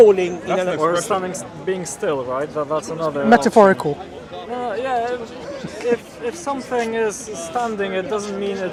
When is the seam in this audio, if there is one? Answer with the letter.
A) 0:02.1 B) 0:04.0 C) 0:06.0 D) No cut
D